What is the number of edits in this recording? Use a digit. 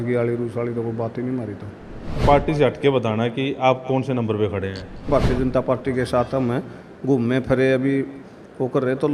2